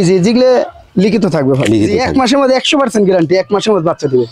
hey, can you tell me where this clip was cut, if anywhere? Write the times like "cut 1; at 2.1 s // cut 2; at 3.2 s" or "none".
cut 1; at 2.0 s